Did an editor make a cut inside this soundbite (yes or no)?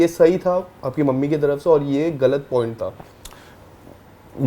no